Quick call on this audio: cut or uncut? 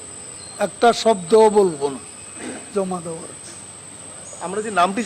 uncut